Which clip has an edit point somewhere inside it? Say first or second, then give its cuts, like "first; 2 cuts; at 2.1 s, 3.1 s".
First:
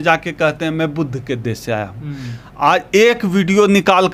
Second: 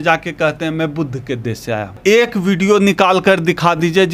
second; 1 cut; at 2.0 s